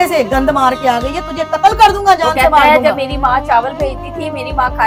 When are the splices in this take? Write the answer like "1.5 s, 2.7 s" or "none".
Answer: none